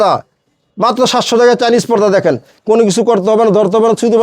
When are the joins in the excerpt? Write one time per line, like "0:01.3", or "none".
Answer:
0:02.5